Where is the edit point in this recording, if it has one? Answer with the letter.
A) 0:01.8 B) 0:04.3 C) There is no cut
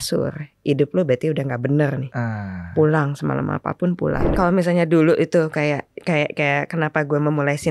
B